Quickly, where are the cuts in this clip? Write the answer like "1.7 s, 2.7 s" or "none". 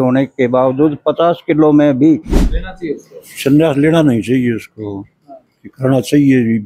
2.4 s